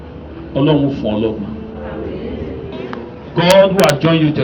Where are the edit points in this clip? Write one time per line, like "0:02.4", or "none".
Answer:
0:02.7